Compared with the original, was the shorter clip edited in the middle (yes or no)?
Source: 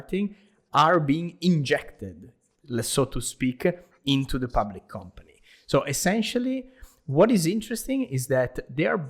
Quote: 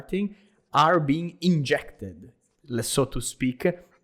no